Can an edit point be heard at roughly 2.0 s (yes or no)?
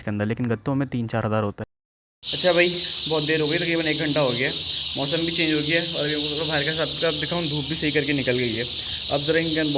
yes